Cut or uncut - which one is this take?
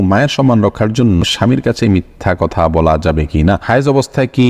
cut